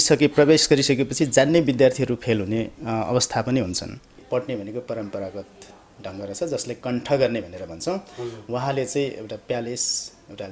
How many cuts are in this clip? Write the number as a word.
one